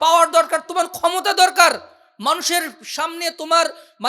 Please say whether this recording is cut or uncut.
uncut